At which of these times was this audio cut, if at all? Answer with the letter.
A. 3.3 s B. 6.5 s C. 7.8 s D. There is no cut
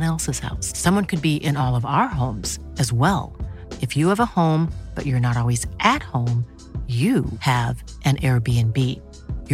D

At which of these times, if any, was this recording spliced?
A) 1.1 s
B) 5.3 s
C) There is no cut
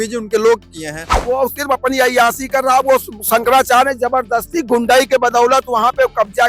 A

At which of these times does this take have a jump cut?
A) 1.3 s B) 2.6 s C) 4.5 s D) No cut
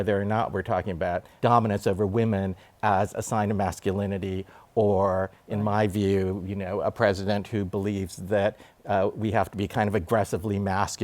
A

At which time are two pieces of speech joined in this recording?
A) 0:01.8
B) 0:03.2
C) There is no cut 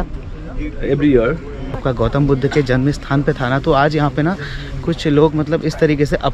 A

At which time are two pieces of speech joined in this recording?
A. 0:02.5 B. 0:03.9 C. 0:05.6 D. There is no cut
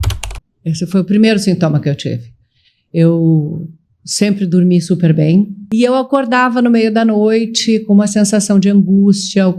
C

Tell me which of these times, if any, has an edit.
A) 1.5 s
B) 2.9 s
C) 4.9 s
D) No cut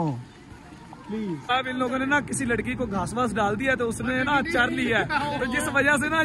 A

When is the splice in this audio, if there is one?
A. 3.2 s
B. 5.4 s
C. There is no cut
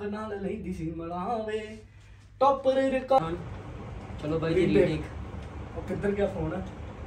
A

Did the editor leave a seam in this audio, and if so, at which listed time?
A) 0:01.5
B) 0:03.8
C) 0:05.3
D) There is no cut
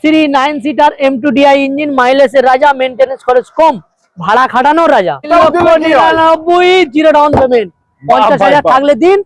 C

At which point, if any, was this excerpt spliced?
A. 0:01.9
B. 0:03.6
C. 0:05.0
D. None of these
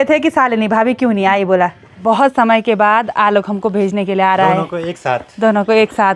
A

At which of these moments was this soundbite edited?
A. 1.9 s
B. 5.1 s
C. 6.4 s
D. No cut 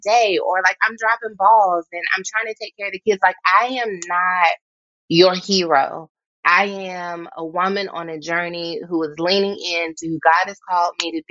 C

